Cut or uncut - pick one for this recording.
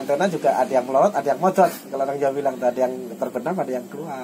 uncut